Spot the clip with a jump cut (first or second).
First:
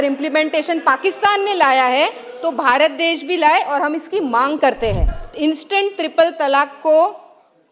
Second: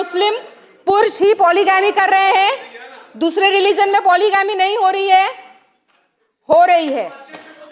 first